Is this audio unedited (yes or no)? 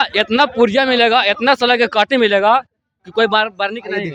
yes